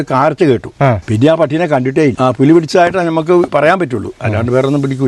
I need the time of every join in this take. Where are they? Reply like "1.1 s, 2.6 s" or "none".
2.2 s